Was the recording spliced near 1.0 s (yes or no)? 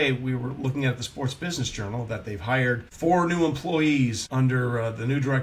no